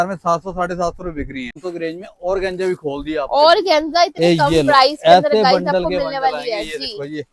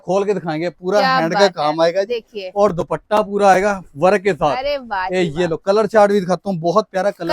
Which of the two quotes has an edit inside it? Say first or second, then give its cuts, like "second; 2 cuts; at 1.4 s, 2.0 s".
first; 1 cut; at 1.6 s